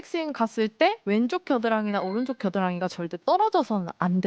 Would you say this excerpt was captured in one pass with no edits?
no; 1 cut; at 1.0 s

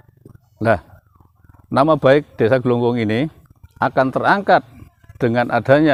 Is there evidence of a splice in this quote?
no; 0 cuts

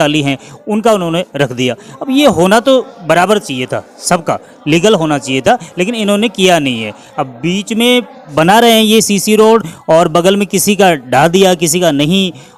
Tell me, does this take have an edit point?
no; 0 cuts

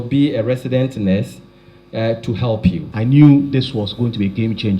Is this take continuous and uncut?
no; 1 cut; at 2.9 s

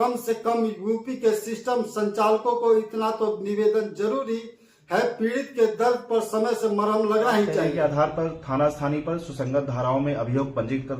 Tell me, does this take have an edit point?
yes; 1 cut; at 7.7 s

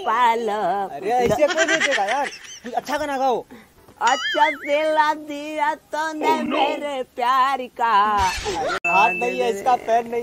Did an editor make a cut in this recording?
yes; 1 cut; at 8.8 s

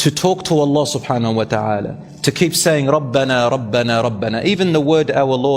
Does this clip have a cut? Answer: no; 0 cuts

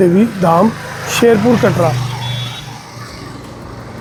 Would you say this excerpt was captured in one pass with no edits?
yes; 0 cuts

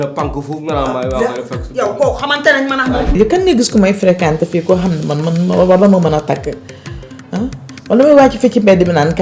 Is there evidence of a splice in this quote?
yes; 1 cut; at 3.2 s

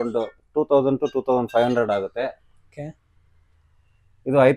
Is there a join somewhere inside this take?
no; 0 cuts

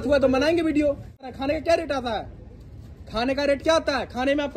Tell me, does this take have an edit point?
yes; 1 cut; at 1.3 s

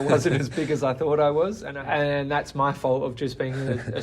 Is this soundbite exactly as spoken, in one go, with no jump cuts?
no; 1 cut; at 1.7 s

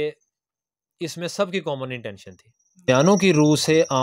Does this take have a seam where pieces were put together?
yes; 1 cut; at 2.9 s

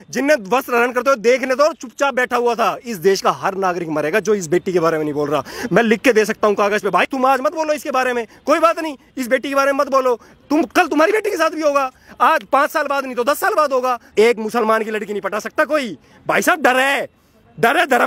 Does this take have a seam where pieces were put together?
yes; 1 cut; at 14.1 s

